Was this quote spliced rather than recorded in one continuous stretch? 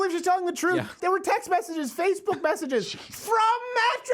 yes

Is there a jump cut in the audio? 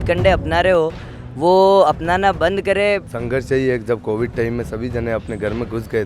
yes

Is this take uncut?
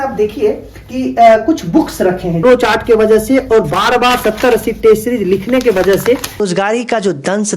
no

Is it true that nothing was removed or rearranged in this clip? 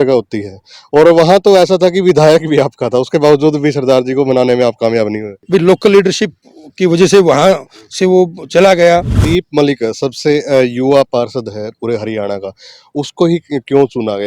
no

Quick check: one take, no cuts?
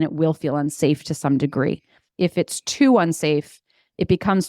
no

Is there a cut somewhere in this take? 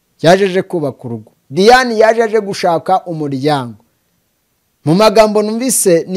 no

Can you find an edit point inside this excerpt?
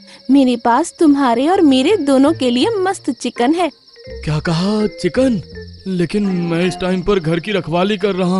no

